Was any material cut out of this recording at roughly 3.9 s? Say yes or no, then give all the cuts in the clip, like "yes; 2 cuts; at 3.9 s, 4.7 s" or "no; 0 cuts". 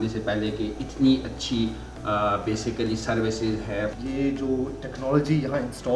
yes; 1 cut; at 3.9 s